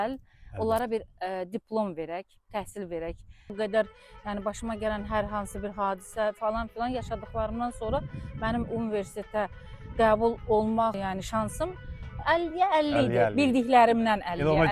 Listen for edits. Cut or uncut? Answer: cut